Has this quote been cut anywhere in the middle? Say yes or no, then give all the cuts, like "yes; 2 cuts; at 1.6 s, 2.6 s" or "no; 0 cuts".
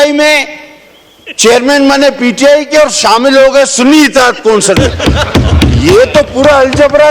no; 0 cuts